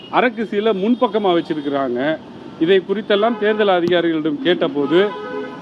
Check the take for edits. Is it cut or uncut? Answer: uncut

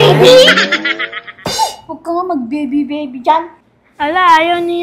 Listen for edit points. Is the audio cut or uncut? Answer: uncut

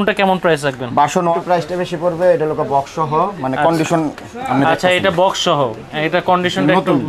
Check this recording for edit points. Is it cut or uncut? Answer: cut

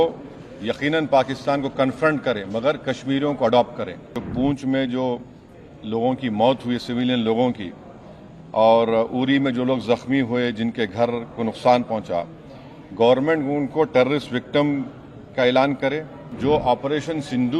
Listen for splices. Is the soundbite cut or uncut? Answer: cut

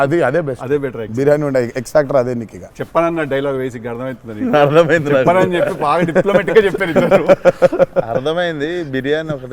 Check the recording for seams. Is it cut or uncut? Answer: uncut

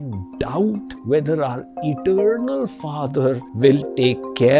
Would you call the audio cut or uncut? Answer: cut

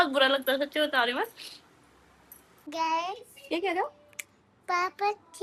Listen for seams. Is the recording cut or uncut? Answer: cut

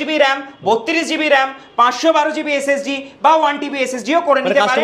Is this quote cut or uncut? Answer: uncut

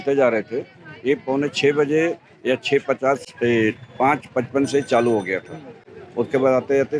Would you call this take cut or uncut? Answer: uncut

